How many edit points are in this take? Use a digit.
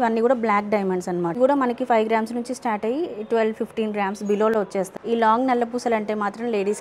2